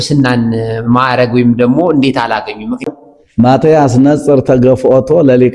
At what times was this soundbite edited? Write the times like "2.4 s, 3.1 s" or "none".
2.9 s